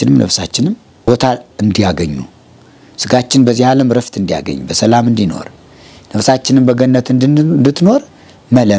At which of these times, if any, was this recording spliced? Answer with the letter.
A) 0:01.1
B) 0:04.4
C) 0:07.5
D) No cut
A